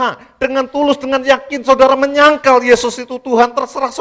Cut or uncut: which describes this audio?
uncut